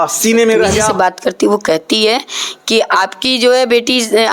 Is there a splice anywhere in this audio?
yes; 1 cut; at 0.9 s

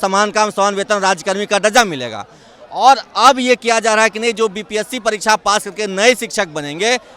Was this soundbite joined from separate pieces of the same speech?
no; 0 cuts

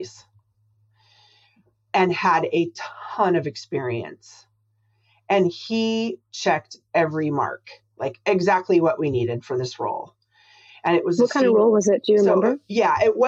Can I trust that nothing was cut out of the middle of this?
yes; 0 cuts

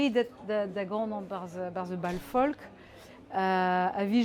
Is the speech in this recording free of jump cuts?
yes; 0 cuts

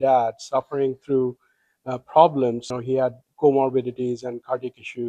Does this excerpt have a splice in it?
yes; 1 cut; at 2.7 s

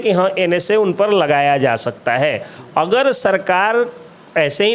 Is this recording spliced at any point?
no; 0 cuts

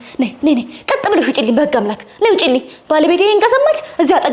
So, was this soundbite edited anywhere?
no; 0 cuts

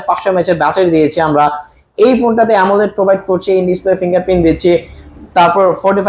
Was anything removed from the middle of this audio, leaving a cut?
no; 0 cuts

